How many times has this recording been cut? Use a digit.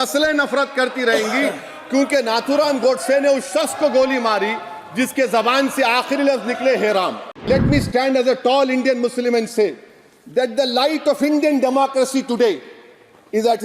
1